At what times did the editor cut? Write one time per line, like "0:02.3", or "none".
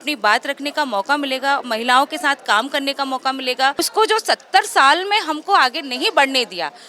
0:03.8